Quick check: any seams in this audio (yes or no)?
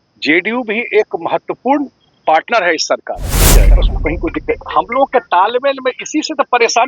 yes